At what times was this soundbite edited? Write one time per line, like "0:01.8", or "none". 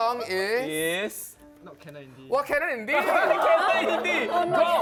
none